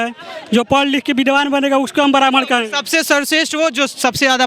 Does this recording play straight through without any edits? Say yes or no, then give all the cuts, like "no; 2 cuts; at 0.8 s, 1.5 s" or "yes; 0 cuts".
yes; 0 cuts